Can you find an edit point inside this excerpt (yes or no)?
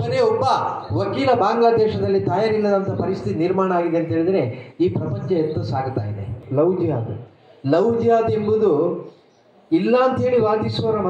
yes